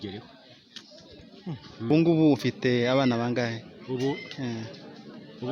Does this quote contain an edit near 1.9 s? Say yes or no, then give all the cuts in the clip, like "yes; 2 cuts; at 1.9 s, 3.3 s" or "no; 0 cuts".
yes; 1 cut; at 1.9 s